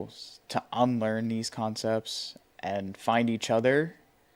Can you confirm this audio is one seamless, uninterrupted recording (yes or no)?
yes